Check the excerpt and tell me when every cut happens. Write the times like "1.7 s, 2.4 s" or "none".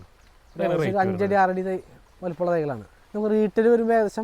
2.9 s